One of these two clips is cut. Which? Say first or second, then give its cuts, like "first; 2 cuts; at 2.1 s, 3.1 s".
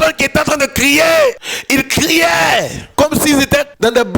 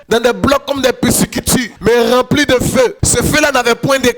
first; 2 cuts; at 1.5 s, 2.8 s